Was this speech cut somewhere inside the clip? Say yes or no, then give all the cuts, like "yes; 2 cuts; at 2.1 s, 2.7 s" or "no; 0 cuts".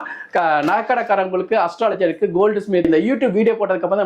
yes; 1 cut; at 2.9 s